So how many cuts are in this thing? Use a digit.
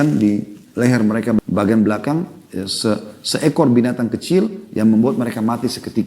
1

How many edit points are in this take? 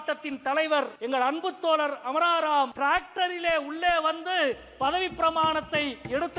2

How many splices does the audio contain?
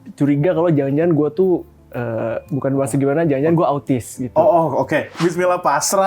1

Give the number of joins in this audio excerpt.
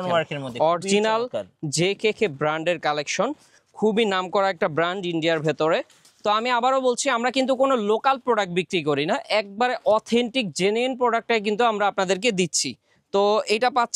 0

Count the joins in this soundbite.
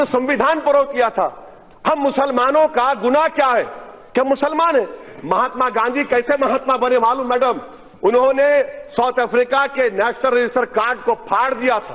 1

